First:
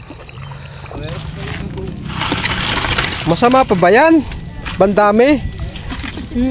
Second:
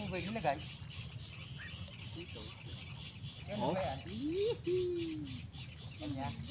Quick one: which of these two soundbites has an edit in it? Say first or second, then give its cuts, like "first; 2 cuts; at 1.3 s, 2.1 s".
first; 1 cut; at 1.0 s